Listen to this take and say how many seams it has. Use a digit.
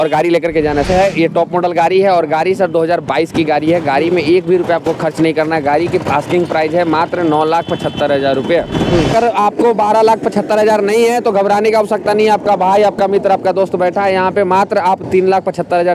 2